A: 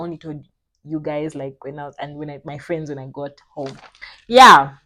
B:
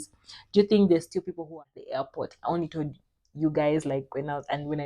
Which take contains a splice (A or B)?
B